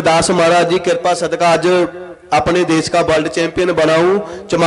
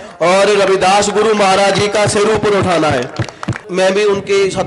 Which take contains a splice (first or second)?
second